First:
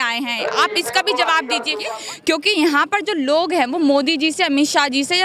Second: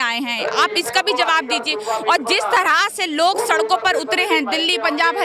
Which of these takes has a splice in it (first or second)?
first